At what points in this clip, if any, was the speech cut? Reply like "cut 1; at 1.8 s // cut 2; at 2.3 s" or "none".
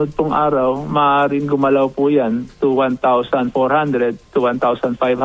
none

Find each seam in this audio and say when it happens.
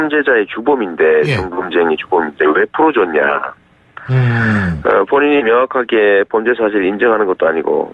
cut 1; at 5.7 s

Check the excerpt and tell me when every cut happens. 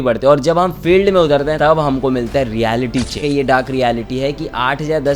cut 1; at 1.6 s // cut 2; at 3.2 s

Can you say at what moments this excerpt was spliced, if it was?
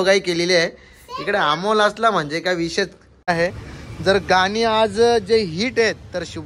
cut 1; at 3.3 s

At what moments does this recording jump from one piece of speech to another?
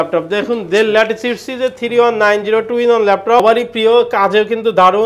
cut 1; at 3.4 s

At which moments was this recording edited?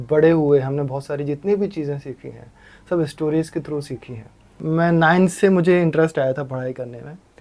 cut 1; at 4.5 s

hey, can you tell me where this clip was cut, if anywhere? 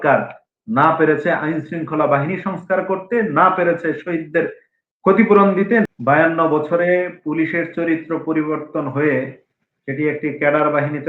cut 1; at 5.9 s

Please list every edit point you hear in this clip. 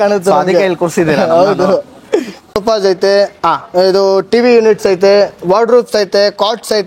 cut 1; at 2.6 s

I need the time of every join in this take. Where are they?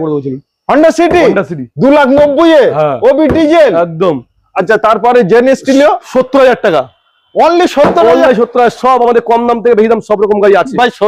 none

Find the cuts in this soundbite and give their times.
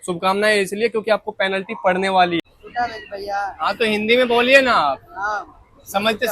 cut 1; at 2.4 s

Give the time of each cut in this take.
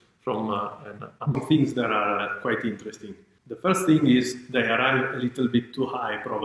cut 1; at 1.3 s

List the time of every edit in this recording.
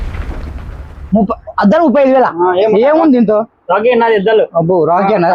none

